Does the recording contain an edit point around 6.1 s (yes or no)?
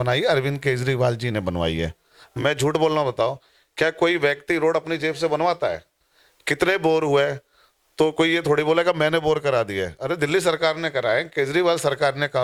no